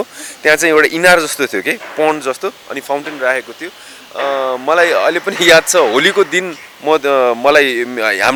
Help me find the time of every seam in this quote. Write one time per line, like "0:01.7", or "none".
none